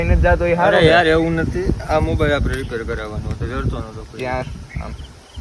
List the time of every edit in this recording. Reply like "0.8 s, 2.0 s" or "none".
none